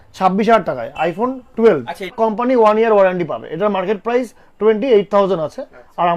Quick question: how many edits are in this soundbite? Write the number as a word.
one